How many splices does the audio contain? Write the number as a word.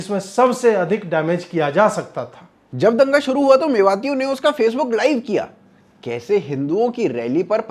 zero